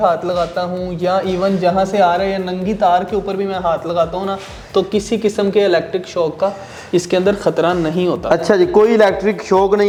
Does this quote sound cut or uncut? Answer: uncut